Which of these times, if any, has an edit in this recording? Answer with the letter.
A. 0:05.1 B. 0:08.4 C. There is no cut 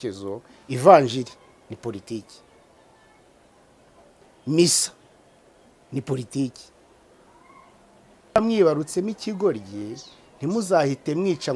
B